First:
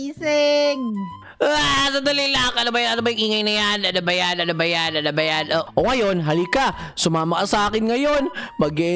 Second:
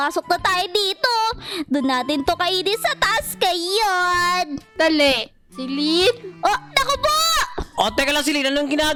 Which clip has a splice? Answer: first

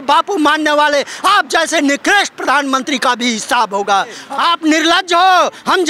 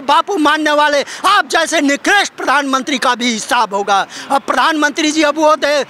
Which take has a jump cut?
first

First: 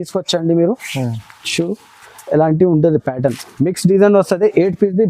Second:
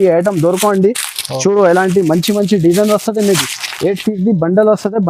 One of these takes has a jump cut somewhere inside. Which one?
first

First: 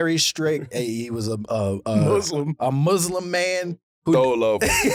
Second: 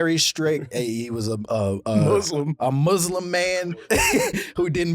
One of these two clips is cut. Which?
second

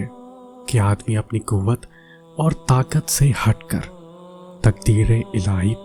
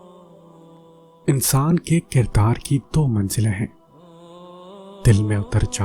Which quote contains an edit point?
second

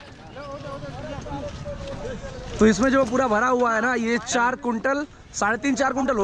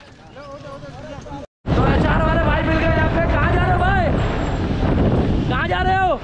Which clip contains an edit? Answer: second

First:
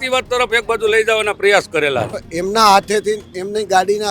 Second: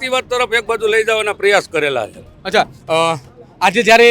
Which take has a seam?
first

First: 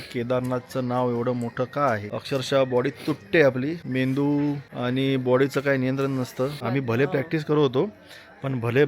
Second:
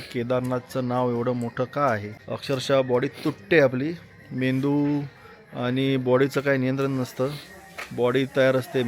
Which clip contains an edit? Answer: first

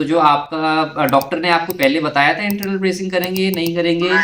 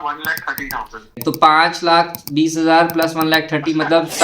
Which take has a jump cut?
second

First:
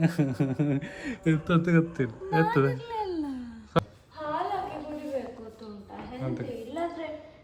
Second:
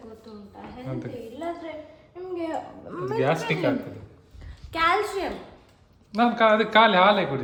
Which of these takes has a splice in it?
first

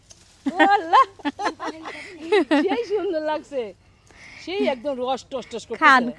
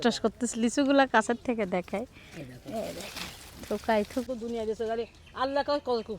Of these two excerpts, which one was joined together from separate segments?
second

